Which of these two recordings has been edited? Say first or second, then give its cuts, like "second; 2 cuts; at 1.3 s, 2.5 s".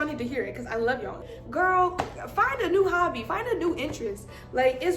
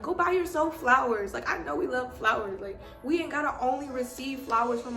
first; 1 cut; at 1.3 s